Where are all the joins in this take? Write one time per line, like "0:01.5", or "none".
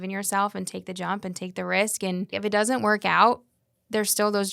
0:02.3